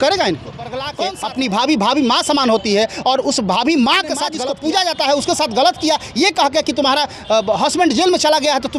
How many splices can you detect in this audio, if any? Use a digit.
2